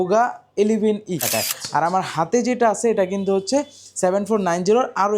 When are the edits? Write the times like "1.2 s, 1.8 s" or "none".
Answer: 1.3 s